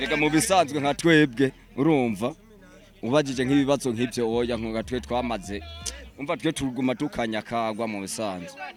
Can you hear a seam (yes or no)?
no